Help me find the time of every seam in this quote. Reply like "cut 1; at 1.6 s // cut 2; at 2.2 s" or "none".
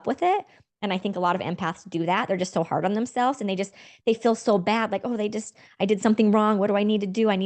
none

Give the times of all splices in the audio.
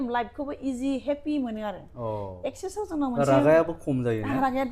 none

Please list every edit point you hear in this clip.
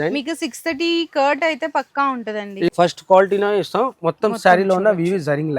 cut 1; at 2.7 s

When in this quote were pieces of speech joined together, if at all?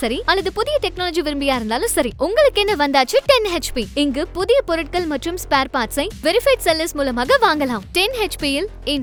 none

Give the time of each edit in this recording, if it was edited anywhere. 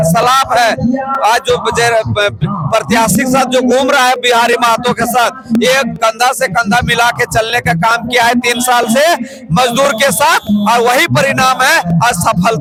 none

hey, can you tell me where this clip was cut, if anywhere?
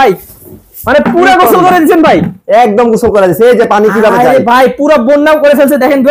none

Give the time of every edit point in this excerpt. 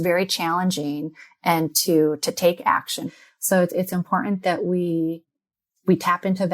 cut 1; at 3.1 s

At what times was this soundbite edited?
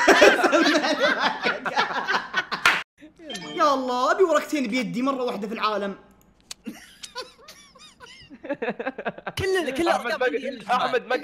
cut 1; at 2.9 s

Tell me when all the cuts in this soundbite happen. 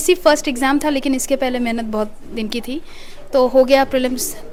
none

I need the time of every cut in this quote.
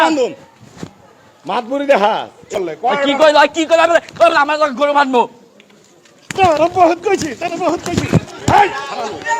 cut 1; at 2.5 s

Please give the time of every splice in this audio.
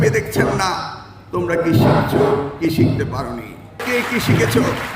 cut 1; at 3.8 s

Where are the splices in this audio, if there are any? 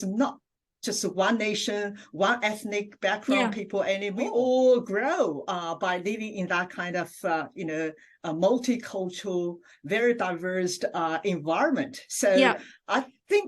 cut 1; at 4.1 s

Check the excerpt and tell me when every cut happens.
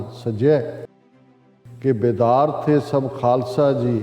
cut 1; at 1.2 s

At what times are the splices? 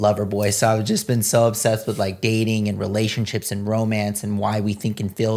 none

